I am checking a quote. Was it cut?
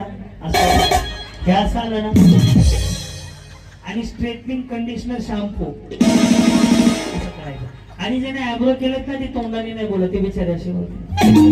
no; 0 cuts

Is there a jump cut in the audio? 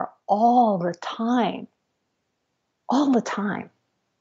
no; 0 cuts

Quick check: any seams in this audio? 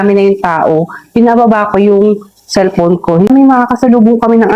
yes; 1 cut; at 3.3 s

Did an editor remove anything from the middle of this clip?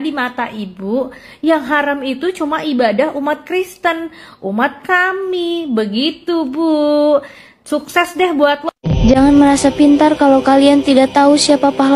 no; 0 cuts

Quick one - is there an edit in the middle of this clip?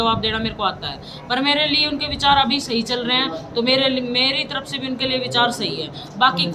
no; 0 cuts

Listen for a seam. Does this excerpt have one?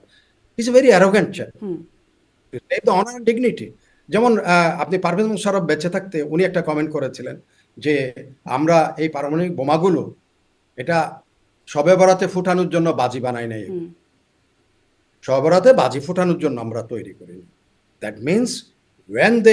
no; 0 cuts

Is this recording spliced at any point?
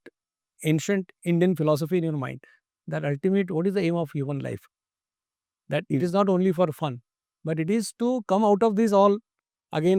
no; 0 cuts

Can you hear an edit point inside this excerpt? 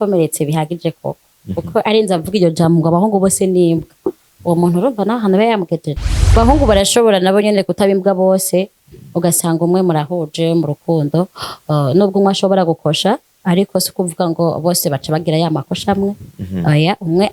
yes; 1 cut; at 6.4 s

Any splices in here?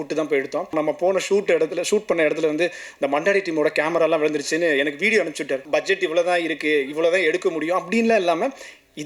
yes; 2 cuts; at 0.7 s, 5.6 s

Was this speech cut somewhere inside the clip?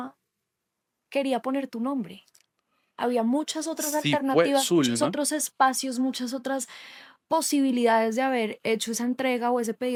no; 0 cuts

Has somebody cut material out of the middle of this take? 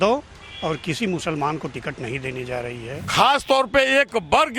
yes; 1 cut; at 3.0 s

